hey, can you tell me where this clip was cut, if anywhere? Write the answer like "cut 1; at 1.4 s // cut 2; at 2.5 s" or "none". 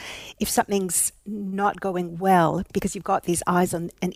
none